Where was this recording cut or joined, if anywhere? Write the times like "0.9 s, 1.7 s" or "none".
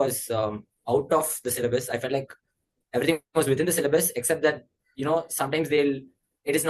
none